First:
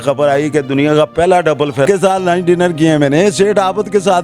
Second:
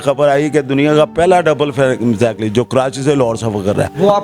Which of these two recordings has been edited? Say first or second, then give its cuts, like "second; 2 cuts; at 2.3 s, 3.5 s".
first; 1 cut; at 1.9 s